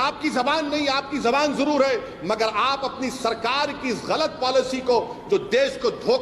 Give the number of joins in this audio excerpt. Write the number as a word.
zero